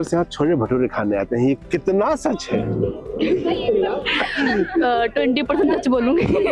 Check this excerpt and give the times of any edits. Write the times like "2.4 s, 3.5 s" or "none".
none